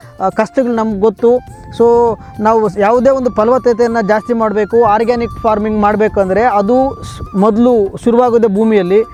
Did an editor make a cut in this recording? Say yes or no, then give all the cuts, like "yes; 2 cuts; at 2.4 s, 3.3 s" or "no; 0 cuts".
no; 0 cuts